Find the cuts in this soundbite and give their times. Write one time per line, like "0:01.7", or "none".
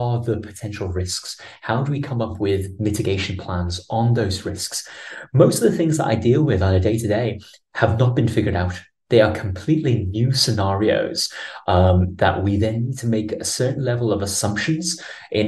none